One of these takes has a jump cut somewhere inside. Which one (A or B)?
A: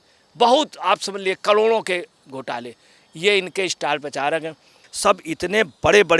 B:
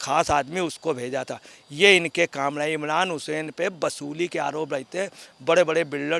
A